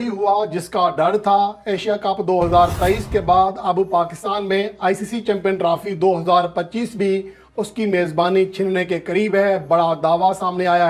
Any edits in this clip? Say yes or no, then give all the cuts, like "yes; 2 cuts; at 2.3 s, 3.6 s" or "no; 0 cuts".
no; 0 cuts